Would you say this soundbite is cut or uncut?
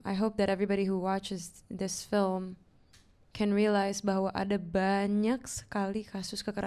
uncut